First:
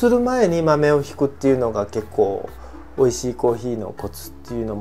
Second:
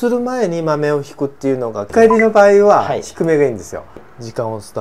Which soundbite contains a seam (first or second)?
second